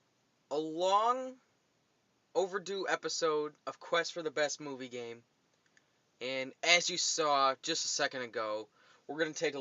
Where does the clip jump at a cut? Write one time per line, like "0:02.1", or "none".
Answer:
0:03.8